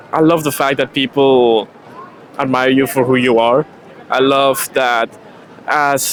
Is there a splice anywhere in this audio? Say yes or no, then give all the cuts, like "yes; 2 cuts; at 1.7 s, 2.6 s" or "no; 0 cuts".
no; 0 cuts